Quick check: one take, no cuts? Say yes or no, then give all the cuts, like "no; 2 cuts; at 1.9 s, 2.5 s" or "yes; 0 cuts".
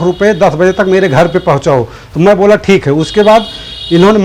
yes; 0 cuts